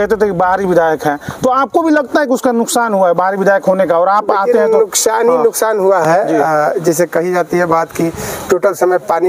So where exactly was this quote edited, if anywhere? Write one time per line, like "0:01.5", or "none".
none